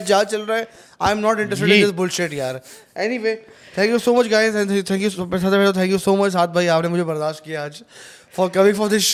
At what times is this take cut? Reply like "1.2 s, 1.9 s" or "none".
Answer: none